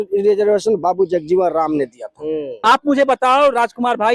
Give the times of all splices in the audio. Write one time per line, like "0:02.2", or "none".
0:02.6